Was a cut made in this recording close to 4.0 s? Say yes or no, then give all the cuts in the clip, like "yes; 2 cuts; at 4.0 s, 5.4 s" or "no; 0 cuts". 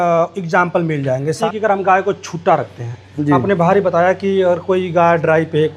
no; 1 cut; at 1.4 s